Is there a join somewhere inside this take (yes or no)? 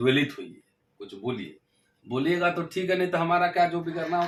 no